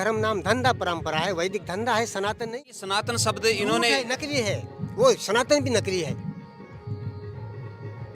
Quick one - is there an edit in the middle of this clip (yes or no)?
yes